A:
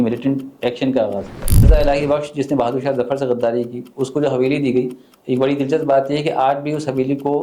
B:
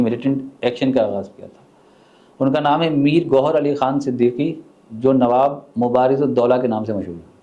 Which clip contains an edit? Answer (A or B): A